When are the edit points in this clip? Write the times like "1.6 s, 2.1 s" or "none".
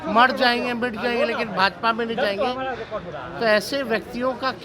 none